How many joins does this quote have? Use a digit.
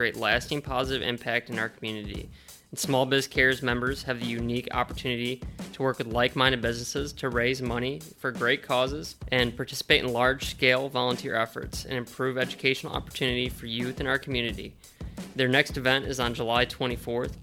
1